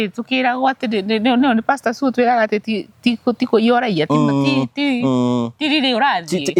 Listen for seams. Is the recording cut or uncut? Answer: uncut